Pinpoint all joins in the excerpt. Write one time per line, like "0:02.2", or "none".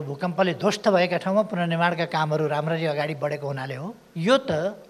0:04.0